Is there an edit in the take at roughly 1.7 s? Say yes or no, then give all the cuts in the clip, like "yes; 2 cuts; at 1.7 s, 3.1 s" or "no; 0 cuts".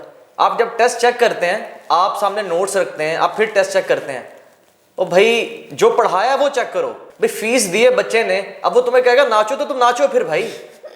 no; 1 cut; at 7.0 s